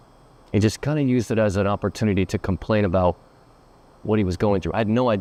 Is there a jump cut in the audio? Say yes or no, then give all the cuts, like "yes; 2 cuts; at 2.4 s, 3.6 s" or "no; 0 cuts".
no; 0 cuts